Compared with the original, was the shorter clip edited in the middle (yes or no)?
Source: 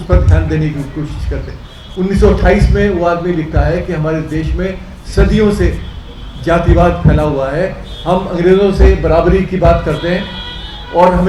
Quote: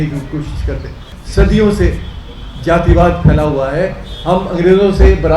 yes